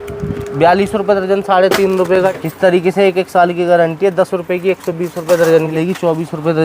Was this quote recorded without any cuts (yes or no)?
no